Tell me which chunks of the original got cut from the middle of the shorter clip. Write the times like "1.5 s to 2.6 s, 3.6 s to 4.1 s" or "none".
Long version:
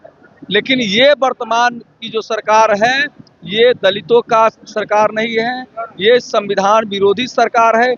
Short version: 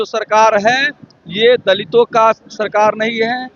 none

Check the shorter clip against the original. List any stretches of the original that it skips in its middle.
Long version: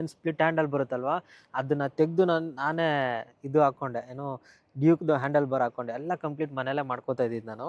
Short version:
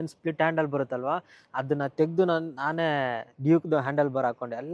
3.3 s to 4.6 s

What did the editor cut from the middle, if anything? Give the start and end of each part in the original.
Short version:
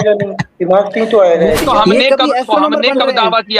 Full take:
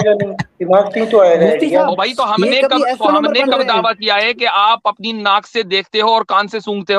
1.6 s to 2.2 s

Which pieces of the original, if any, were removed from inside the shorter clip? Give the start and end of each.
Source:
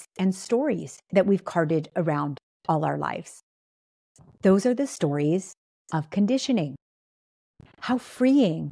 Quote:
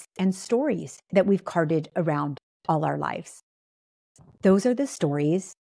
none

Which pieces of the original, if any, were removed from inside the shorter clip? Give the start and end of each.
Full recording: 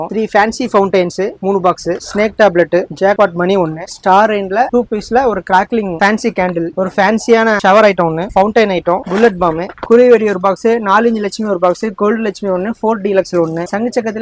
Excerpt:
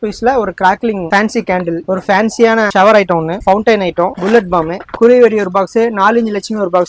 none

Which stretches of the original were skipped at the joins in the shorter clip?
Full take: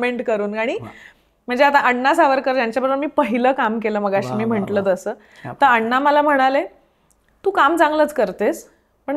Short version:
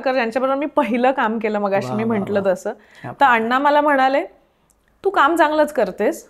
none

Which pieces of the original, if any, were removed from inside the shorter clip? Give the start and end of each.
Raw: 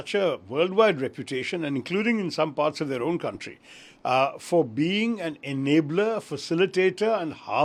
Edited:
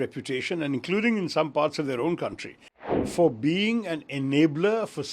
4.0 s to 4.3 s

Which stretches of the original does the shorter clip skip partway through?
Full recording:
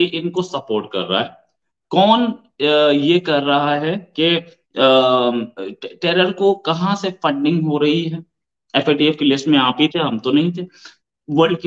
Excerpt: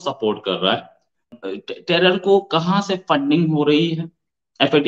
1.8 s to 5.5 s

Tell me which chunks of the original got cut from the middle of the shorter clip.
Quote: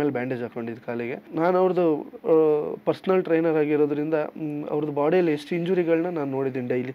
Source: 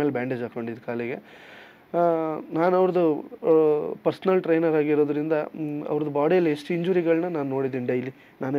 1.3 s to 2.4 s

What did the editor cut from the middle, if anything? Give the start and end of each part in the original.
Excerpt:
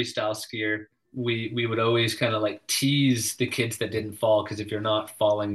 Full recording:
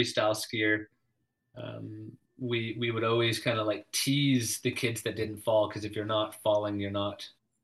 1.0 s to 2.2 s

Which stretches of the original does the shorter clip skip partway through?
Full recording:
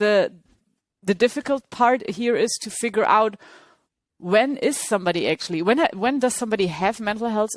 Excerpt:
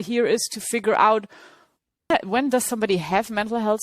4.2 s to 5.8 s

